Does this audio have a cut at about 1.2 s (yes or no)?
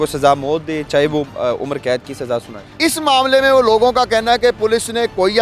no